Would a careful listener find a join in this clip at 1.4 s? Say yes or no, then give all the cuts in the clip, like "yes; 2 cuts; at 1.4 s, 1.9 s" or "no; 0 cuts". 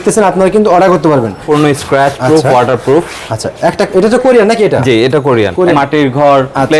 yes; 2 cuts; at 1.4 s, 5.7 s